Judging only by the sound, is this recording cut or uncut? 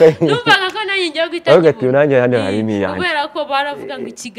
uncut